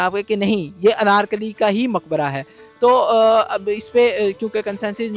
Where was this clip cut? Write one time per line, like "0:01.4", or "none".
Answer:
none